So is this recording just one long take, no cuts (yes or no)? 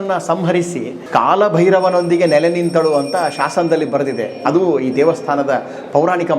no